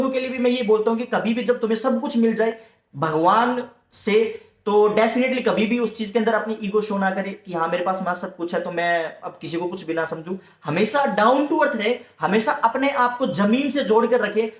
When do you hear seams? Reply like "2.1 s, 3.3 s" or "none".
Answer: none